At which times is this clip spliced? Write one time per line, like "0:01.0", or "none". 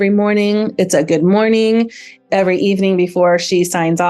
none